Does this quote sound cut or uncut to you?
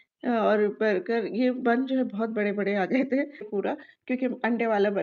cut